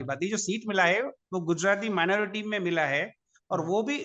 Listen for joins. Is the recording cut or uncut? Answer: uncut